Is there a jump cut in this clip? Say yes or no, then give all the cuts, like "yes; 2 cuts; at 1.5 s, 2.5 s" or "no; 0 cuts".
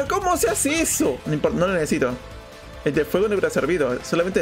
yes; 1 cut; at 1.2 s